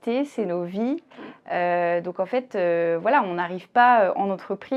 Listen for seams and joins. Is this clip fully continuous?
yes; 0 cuts

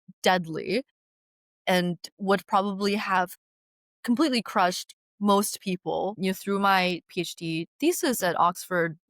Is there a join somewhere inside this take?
yes; 1 cut; at 6.2 s

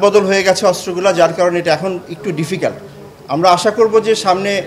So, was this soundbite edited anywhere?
no; 0 cuts

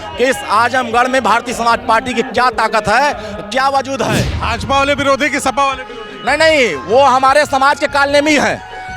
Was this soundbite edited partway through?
yes; 1 cut; at 4.4 s

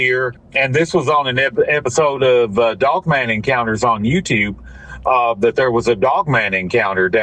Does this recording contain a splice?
no; 0 cuts

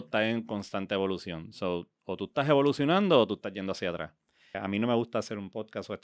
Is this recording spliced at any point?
yes; 1 cut; at 4.6 s

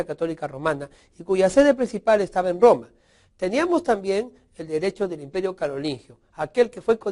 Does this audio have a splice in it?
yes; 1 cut; at 3.5 s

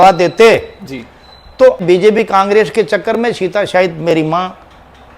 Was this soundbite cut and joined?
yes; 1 cut; at 1.8 s

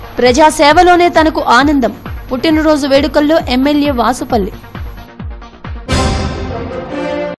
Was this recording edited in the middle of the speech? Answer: no; 0 cuts

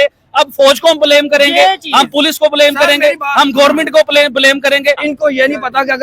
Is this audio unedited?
no; 1 cut; at 5.1 s

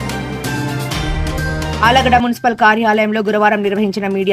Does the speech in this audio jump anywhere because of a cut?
yes; 1 cut; at 1.8 s

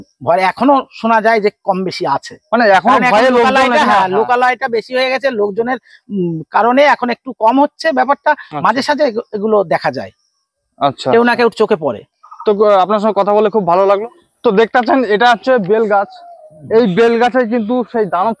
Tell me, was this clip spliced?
no; 0 cuts

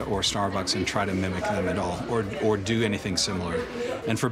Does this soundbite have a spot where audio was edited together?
no; 0 cuts

